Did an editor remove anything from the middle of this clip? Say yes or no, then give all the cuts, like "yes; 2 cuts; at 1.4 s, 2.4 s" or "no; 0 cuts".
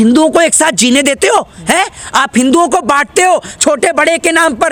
no; 0 cuts